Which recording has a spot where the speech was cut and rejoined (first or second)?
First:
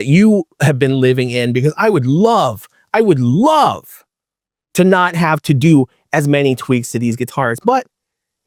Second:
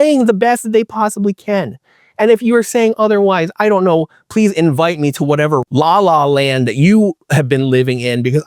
second